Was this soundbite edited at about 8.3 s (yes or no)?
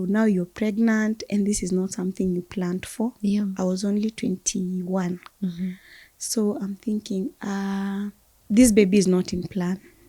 yes